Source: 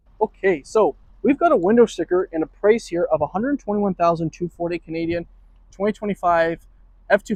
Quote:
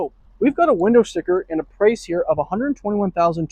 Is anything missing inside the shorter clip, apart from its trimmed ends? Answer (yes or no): no